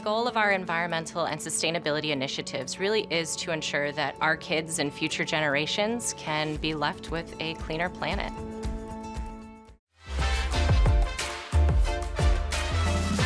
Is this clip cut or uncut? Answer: uncut